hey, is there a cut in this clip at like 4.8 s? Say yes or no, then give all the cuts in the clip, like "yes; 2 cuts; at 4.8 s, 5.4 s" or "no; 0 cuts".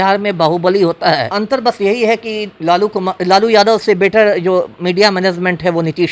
no; 1 cut; at 1.4 s